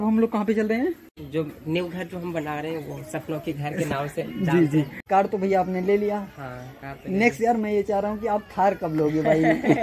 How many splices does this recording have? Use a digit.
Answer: 2